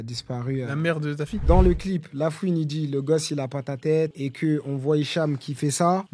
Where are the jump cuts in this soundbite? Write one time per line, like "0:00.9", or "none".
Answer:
0:01.4